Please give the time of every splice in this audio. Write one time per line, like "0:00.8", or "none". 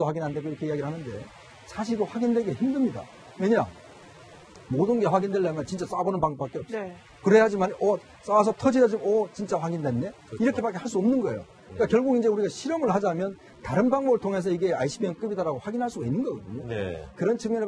0:09.0

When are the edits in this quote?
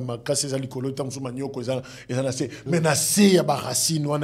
none

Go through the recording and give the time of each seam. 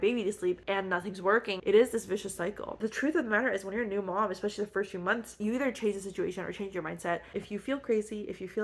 0:01.6
0:02.7
0:05.3
0:07.4

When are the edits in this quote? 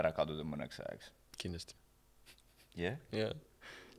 none

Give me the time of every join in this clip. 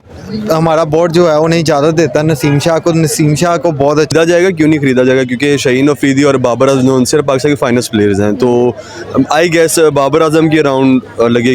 0:04.1

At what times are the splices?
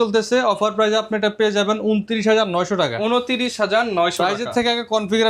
none

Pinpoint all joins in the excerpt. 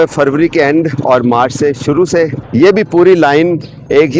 0:02.4

